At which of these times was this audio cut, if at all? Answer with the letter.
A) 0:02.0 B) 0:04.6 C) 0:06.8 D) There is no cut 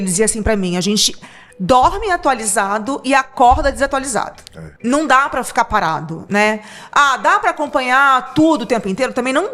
B